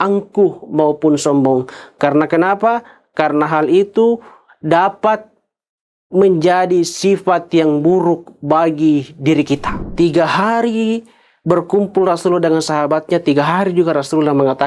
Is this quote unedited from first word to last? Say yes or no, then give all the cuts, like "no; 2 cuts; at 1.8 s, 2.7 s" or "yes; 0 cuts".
no; 1 cut; at 9.8 s